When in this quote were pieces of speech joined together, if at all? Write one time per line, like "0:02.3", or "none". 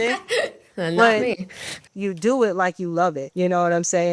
0:01.8
0:03.2